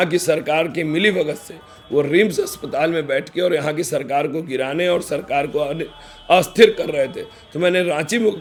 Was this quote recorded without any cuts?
yes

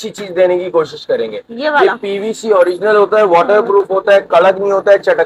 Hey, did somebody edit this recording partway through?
no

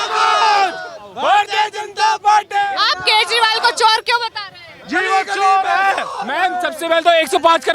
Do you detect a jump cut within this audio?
no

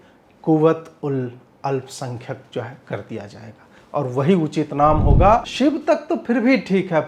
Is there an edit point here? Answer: yes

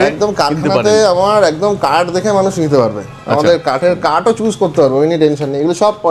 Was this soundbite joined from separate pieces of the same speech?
no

